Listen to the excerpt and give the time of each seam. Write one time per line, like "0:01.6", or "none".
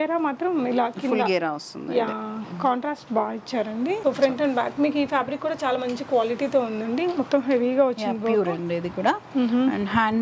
0:04.0